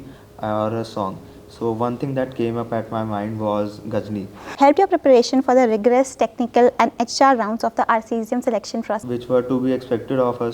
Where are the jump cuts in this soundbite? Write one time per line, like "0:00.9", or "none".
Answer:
0:04.4
0:09.0